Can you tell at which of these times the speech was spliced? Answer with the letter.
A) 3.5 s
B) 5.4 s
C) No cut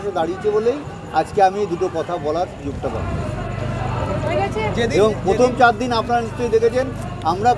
C